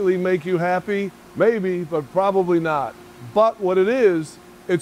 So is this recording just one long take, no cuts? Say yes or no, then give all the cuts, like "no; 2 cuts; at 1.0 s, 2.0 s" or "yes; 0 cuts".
no; 1 cut; at 1.2 s